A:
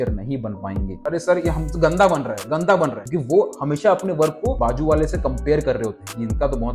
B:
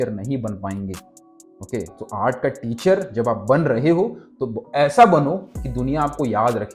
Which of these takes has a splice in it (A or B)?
A